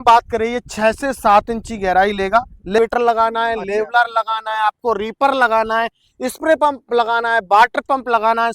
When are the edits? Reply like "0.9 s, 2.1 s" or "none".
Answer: 2.8 s